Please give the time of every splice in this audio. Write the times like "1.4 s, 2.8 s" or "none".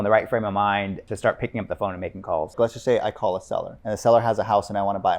1.0 s, 2.6 s, 3.7 s